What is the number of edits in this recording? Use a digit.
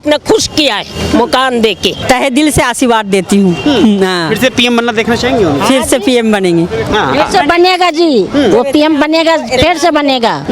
1